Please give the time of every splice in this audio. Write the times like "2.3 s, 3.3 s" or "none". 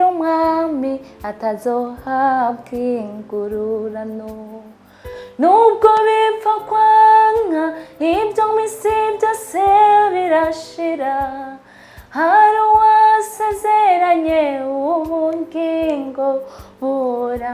none